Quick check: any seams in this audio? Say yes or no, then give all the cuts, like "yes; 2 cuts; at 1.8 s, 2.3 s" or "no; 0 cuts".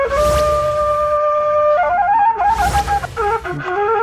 yes; 1 cut; at 3.0 s